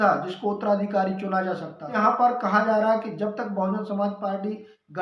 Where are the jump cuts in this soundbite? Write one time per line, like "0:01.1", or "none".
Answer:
0:01.9